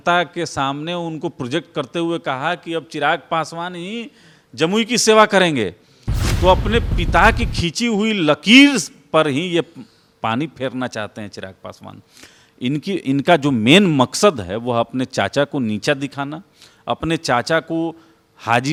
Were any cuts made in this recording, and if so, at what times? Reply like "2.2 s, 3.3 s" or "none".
none